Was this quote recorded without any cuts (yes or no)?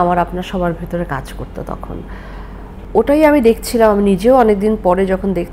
no